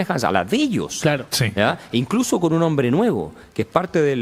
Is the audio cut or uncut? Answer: uncut